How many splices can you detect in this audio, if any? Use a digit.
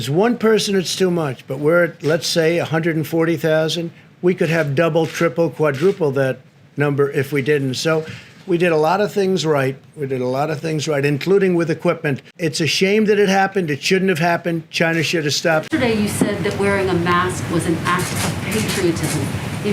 1